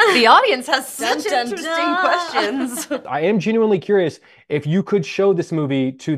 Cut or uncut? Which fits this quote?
cut